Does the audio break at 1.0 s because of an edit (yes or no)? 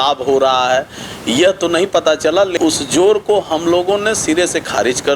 no